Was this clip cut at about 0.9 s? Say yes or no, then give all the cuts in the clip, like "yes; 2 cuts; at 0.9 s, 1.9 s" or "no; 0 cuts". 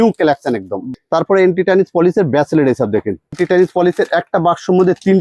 yes; 2 cuts; at 0.9 s, 3.3 s